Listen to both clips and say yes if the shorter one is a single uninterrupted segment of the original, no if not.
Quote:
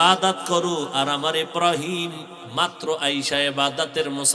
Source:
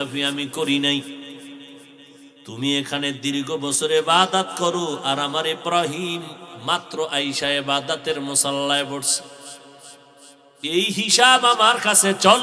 yes